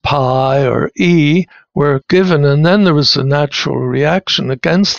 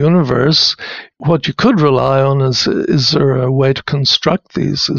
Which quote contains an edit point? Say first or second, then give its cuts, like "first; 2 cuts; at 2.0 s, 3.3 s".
first; 1 cut; at 1.9 s